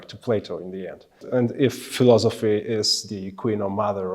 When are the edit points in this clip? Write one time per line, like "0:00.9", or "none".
0:01.2